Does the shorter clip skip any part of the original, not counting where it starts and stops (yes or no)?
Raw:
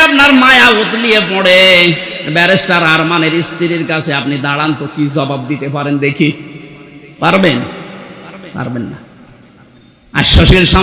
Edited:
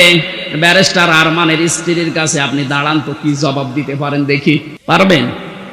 yes